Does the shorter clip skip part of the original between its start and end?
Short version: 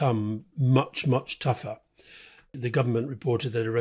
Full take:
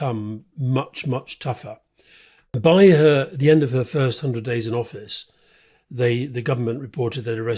yes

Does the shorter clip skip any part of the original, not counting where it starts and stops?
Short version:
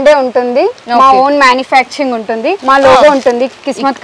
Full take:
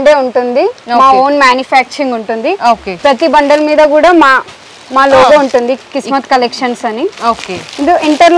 yes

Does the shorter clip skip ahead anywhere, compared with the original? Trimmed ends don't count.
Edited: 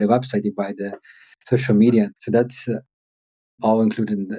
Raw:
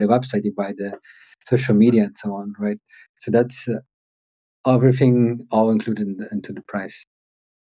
yes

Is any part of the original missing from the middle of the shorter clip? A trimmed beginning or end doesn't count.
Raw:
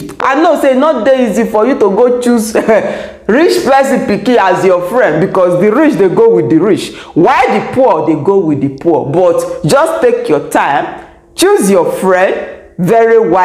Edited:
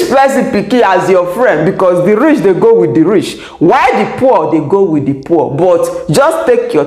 no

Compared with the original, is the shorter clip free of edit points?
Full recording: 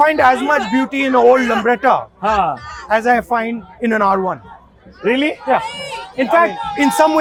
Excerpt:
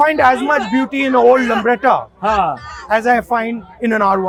yes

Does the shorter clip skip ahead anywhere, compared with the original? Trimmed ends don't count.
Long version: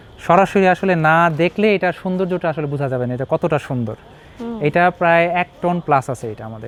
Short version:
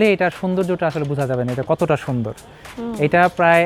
no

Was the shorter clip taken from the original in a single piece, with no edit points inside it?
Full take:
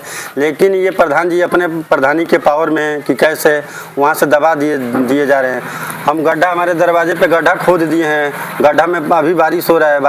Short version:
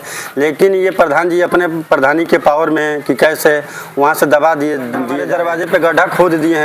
no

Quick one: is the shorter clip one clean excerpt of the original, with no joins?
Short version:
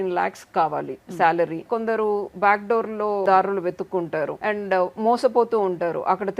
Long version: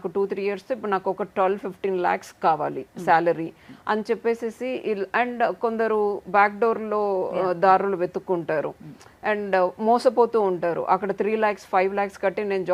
no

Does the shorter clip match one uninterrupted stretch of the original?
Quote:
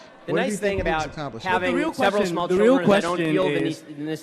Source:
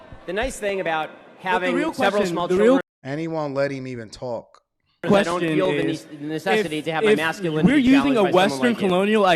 no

